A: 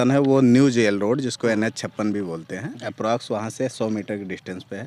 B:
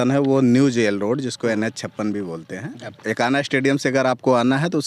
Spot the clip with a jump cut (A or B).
B